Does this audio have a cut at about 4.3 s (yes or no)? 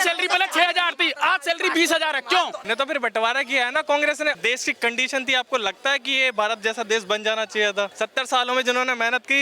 yes